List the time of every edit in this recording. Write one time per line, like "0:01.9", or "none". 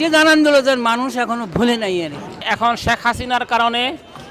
0:02.5